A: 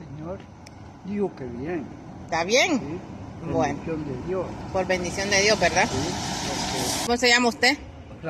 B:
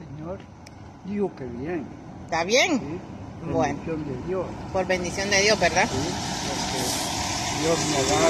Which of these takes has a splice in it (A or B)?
A